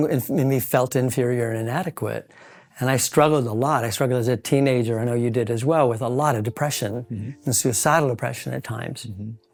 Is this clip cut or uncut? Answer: uncut